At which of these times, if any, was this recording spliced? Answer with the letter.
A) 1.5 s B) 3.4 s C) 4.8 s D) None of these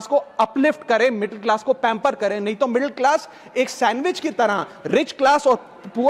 D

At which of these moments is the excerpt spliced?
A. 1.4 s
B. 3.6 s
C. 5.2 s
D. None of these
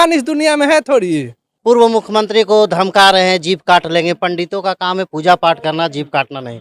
A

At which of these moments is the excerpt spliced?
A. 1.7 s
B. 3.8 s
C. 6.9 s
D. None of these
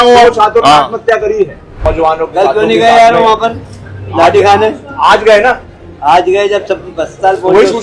A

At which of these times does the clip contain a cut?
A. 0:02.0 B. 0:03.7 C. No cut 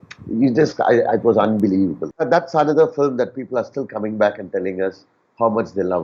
A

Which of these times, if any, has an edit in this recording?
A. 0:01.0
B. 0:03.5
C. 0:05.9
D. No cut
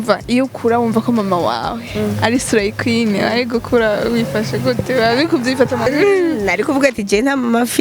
C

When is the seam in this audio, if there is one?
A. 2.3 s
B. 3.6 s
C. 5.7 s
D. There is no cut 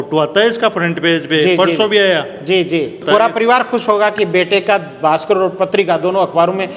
D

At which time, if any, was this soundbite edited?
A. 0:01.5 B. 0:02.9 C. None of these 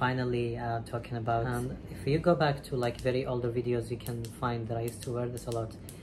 A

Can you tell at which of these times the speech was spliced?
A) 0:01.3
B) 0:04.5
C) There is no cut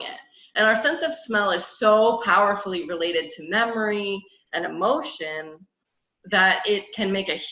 C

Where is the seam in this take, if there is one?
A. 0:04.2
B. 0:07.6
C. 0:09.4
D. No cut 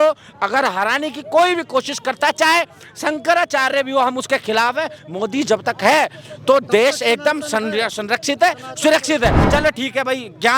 C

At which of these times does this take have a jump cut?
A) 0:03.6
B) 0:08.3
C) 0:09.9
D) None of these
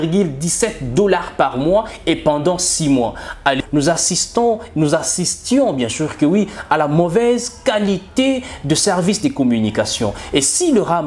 A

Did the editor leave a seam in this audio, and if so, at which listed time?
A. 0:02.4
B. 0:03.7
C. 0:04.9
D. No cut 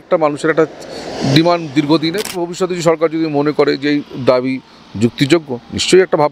A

